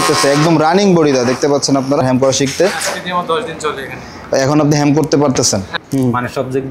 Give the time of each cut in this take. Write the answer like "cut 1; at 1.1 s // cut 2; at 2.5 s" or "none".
cut 1; at 2.0 s // cut 2; at 5.8 s